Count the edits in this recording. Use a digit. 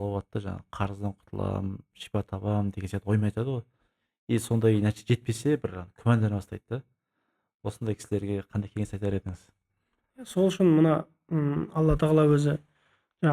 0